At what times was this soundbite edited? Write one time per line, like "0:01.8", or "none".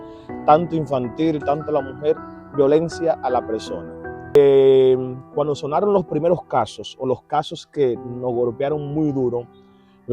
0:04.4